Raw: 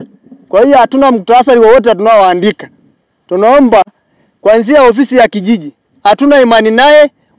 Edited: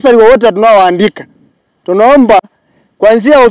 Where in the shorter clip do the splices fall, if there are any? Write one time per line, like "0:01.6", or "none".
none